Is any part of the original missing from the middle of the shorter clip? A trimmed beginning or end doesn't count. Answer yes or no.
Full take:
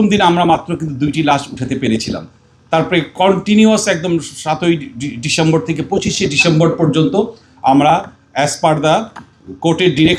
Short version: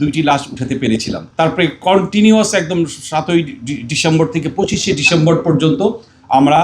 yes